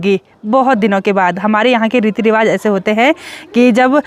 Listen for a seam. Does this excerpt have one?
no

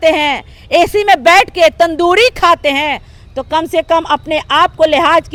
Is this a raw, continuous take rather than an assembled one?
yes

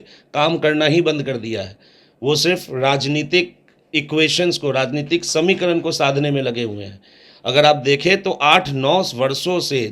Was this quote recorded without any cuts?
yes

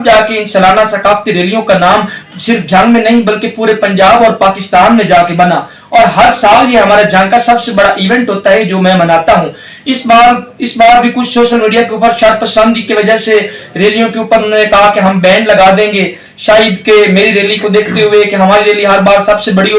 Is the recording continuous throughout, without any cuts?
yes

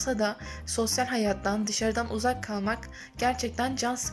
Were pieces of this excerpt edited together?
no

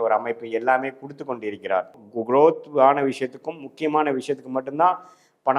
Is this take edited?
yes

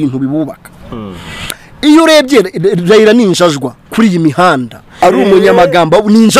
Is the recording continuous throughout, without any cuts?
no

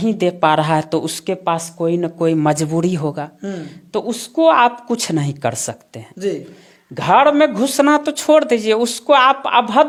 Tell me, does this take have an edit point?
no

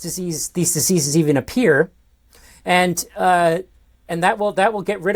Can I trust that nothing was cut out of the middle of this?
yes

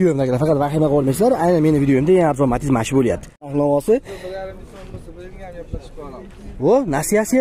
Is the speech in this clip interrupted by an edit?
yes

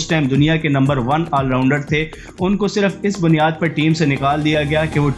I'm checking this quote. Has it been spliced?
no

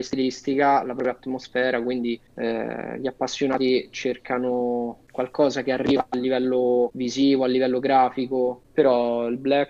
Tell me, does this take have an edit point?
yes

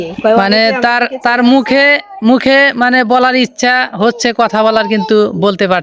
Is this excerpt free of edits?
yes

